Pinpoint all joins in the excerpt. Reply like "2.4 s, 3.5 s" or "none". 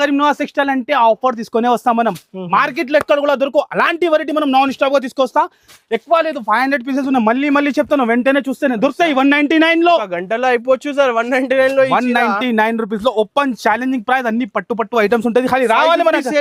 none